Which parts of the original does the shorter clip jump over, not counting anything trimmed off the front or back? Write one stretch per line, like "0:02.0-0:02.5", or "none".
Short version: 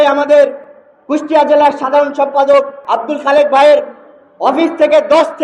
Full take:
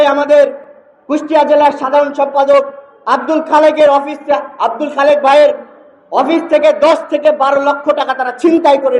0:02.8-0:04.5